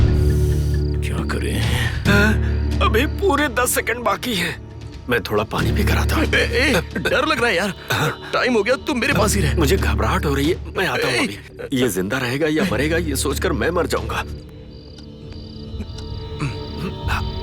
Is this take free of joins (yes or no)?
yes